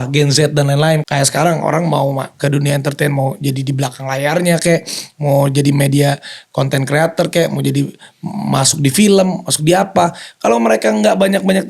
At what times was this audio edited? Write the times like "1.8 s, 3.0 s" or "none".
1.0 s